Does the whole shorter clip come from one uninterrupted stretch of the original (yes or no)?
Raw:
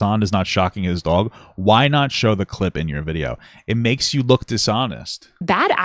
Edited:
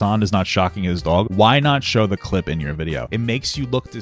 no